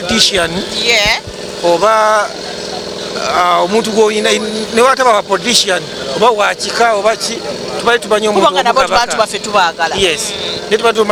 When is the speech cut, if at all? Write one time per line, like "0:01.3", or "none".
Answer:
none